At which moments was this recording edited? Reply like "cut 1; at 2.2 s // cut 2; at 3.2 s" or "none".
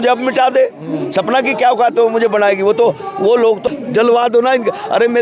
cut 1; at 3.6 s